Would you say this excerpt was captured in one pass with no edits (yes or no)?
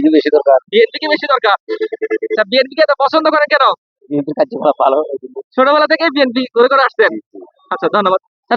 yes